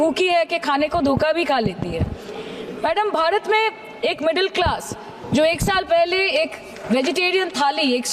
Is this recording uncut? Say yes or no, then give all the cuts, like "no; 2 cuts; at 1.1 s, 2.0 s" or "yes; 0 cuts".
yes; 0 cuts